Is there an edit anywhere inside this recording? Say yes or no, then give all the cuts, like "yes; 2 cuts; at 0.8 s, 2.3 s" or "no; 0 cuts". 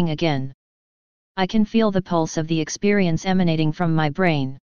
yes; 1 cut; at 3.1 s